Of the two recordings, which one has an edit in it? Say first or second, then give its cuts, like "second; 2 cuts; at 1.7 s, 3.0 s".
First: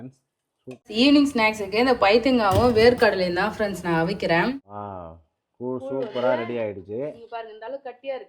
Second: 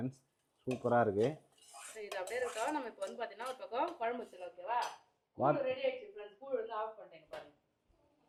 first; 2 cuts; at 0.9 s, 4.5 s